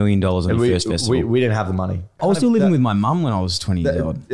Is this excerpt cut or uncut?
cut